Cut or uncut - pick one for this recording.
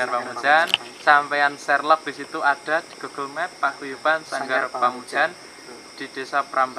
uncut